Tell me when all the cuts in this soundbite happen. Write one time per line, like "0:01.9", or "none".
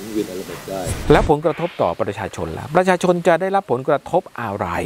0:00.9